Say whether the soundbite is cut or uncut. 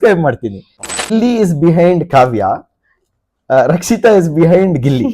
cut